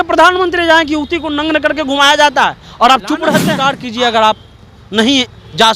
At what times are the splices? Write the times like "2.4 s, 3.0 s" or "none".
3.5 s